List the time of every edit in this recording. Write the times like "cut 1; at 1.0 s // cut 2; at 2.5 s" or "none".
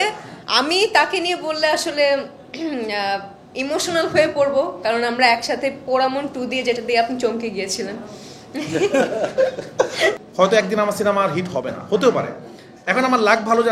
cut 1; at 10.2 s